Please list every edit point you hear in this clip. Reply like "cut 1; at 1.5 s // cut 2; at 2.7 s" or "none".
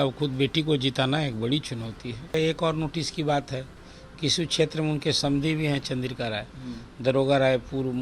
cut 1; at 2.3 s

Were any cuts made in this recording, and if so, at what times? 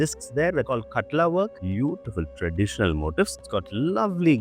cut 1; at 1.6 s // cut 2; at 3.3 s

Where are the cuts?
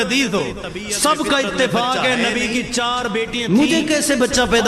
cut 1; at 3.4 s

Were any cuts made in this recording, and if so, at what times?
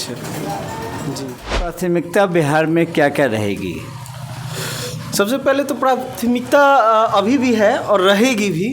cut 1; at 1.7 s

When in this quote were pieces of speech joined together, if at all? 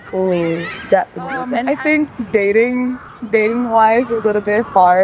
cut 1; at 1.5 s // cut 2; at 3.1 s

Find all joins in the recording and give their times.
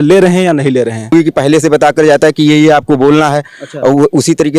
cut 1; at 1.1 s

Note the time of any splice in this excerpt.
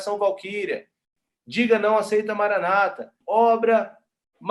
cut 1; at 1.1 s // cut 2; at 3.1 s

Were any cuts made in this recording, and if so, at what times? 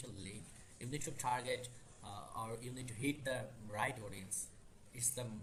none

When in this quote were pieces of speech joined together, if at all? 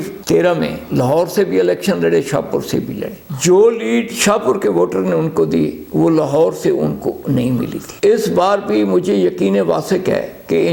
none

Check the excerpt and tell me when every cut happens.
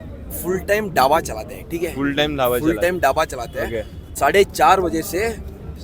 cut 1; at 4.0 s

